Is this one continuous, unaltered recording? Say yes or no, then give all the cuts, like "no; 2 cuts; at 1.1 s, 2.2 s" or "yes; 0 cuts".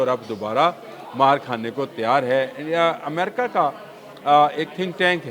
yes; 0 cuts